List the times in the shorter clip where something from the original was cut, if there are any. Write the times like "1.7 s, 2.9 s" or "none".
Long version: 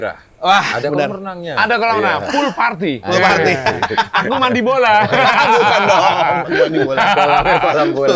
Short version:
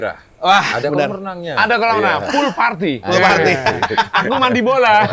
none